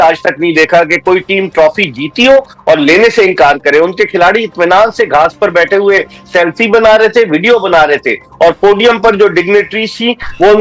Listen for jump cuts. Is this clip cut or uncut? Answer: uncut